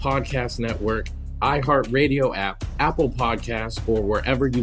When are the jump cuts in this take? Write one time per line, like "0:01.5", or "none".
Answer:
0:01.1